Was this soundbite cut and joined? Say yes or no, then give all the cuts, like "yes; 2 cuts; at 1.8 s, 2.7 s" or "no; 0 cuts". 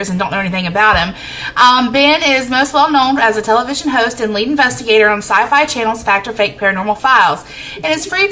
no; 0 cuts